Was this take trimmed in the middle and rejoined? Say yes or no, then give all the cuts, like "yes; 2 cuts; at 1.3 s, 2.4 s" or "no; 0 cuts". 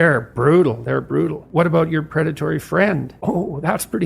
yes; 2 cuts; at 1.4 s, 3.1 s